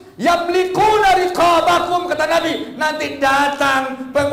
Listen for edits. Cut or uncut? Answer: uncut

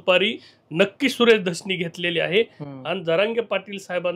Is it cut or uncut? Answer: uncut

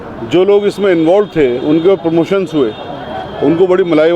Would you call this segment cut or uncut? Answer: uncut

